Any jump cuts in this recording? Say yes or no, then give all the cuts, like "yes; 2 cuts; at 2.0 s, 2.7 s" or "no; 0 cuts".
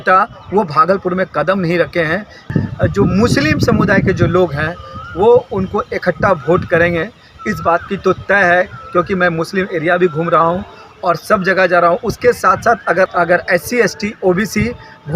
yes; 2 cuts; at 2.5 s, 13.1 s